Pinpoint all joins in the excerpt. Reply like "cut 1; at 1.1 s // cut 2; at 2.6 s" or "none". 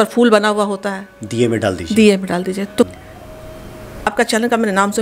cut 1; at 2.9 s